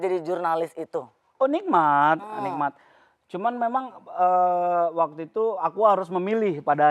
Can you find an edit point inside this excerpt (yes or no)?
no